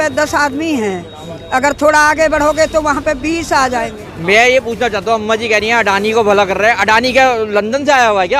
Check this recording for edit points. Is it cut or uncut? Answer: cut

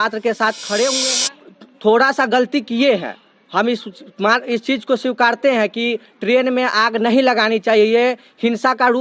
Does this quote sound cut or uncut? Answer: cut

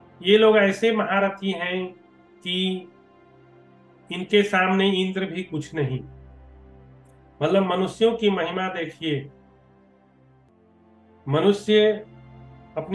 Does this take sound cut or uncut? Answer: cut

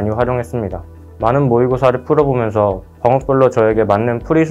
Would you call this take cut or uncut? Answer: uncut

